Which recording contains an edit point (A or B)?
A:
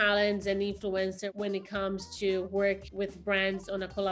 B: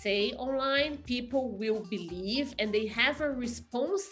A